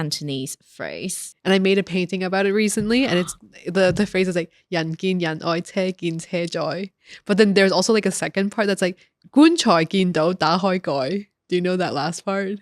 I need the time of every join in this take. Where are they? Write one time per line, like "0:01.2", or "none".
0:01.2